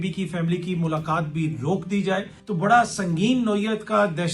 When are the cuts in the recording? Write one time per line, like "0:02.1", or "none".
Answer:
0:02.4